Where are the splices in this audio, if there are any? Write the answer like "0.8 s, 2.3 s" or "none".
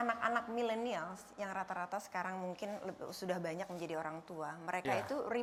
none